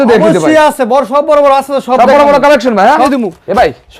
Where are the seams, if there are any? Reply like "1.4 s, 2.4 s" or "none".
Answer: 3.1 s